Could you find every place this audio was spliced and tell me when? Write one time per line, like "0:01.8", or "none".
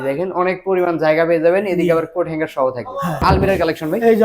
0:03.2